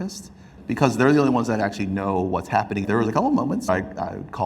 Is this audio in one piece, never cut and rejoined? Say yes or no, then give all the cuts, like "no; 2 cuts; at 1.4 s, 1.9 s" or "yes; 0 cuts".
no; 2 cuts; at 2.8 s, 3.7 s